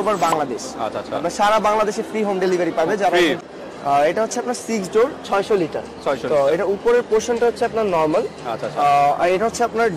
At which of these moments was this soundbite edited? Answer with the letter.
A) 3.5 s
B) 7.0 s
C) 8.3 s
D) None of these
A